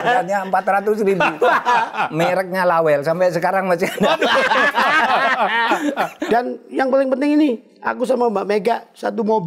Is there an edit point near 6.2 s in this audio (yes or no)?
yes